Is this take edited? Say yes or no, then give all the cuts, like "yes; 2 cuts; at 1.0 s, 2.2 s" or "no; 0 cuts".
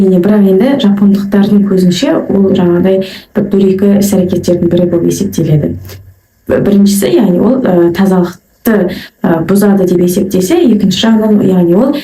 no; 0 cuts